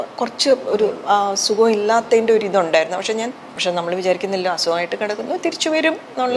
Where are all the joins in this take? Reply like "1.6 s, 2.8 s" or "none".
3.5 s